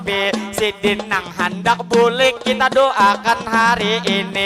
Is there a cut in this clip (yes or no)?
no